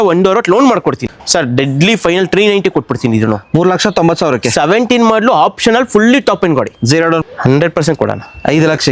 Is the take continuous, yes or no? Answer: no